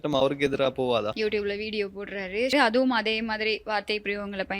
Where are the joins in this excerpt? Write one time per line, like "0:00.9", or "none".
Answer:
0:01.1
0:02.5